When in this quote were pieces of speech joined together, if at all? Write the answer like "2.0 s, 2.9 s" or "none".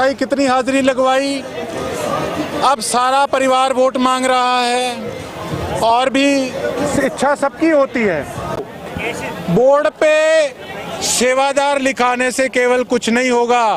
8.7 s